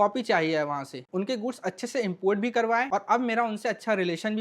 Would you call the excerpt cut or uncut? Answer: cut